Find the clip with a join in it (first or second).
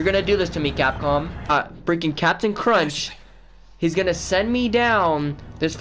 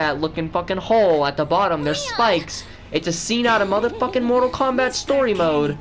first